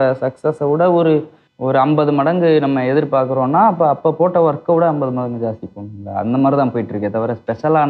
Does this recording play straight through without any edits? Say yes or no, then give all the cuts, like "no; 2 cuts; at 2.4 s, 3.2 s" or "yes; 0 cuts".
yes; 0 cuts